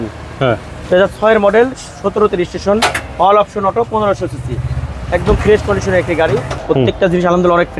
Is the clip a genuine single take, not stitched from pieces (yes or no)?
no